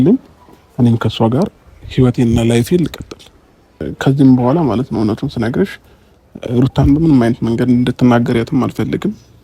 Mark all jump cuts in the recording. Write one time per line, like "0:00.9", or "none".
0:03.9